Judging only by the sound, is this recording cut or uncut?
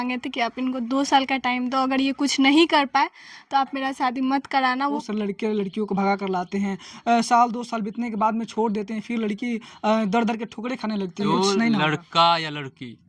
cut